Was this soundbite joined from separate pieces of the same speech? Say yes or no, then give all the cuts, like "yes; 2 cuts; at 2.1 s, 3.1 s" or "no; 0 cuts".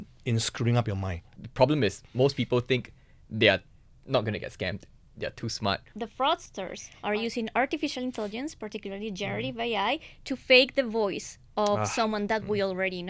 yes; 2 cuts; at 1.3 s, 5.9 s